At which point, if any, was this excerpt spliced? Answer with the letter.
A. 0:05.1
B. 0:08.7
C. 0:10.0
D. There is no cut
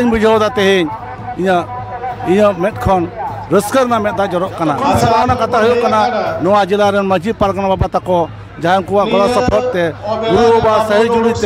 A